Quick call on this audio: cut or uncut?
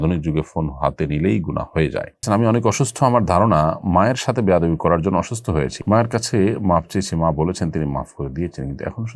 cut